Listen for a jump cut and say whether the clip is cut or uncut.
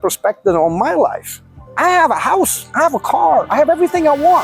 uncut